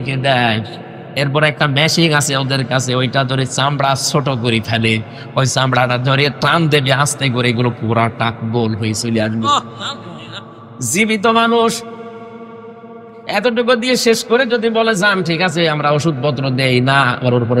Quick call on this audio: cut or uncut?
uncut